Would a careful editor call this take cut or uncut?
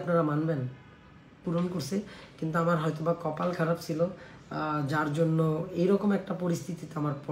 cut